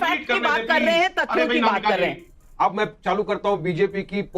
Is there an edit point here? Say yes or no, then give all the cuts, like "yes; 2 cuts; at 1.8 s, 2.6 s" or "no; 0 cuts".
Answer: yes; 1 cut; at 2.2 s